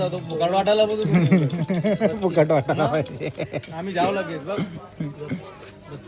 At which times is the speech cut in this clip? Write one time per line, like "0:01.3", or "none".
none